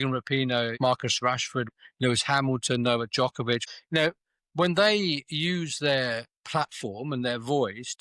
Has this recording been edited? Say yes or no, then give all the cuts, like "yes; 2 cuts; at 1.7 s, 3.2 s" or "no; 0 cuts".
yes; 3 cuts; at 0.8 s, 1.7 s, 3.7 s